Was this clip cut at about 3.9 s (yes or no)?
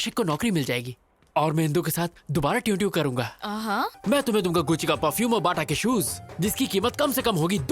yes